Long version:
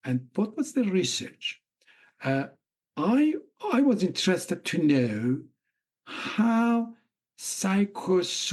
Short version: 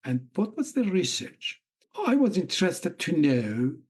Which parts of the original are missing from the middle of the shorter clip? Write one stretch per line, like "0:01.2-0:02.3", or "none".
0:01.9-0:03.5